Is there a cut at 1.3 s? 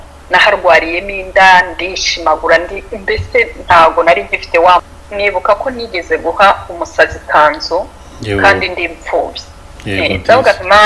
no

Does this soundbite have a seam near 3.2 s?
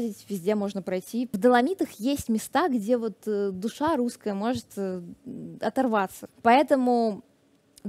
no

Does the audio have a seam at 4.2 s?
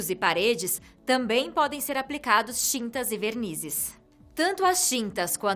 no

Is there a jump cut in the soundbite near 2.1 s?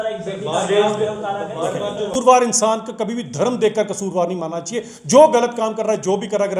yes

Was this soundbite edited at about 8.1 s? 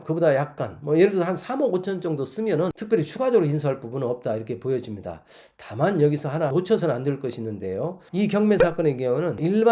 yes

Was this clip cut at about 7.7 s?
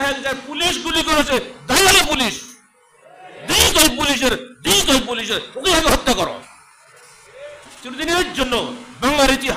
yes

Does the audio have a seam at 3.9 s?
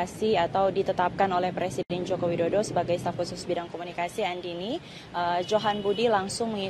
no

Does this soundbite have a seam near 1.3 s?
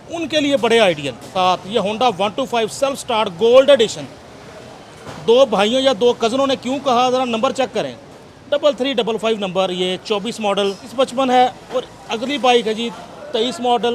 yes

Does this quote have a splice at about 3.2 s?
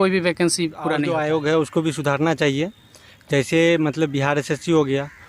no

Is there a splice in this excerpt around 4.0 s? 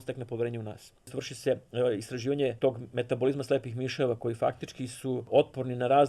no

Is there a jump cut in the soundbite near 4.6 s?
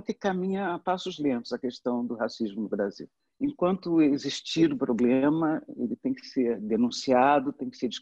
no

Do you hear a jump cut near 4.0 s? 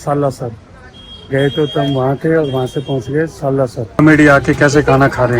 yes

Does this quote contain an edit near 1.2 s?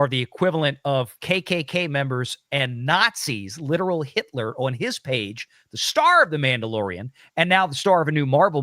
yes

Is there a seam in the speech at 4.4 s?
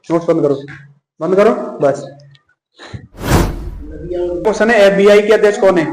yes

